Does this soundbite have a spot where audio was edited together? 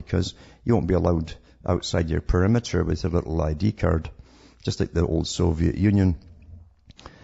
yes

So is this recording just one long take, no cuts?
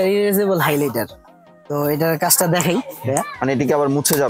yes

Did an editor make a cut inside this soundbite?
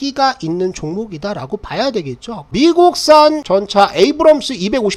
yes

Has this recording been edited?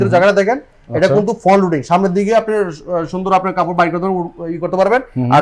no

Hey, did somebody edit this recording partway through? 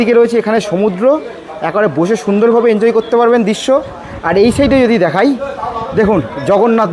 no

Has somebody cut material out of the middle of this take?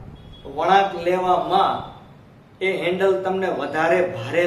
no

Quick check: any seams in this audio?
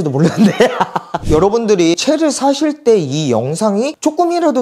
yes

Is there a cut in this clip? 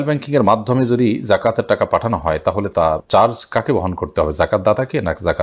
no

